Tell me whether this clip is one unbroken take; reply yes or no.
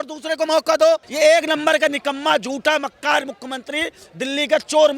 no